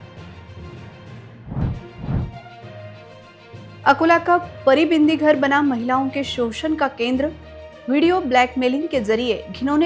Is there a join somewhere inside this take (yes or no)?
yes